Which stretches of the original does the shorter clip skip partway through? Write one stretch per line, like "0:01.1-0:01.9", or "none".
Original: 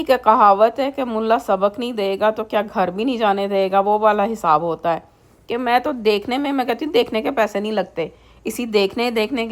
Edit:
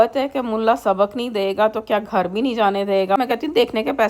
0:03.8-0:06.6